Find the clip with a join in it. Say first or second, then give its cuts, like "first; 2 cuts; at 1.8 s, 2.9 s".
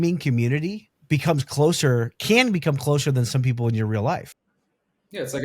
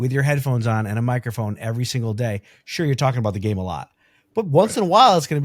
first; 1 cut; at 0.9 s